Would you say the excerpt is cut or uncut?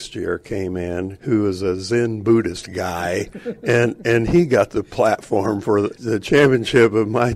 cut